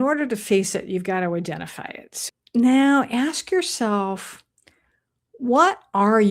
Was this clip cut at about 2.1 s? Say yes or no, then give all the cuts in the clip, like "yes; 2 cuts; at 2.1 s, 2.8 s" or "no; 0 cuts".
yes; 1 cut; at 2.1 s